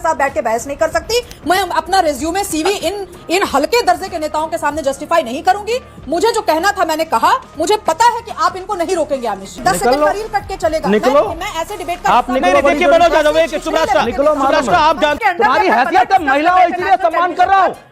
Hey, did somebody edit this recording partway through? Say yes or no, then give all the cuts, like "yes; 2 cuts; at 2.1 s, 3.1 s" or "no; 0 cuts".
yes; 2 cuts; at 9.6 s, 15.2 s